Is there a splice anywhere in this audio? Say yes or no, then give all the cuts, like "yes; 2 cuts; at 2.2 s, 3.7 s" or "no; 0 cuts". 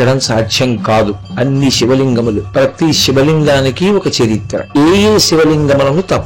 yes; 3 cuts; at 1.2 s, 2.4 s, 4.7 s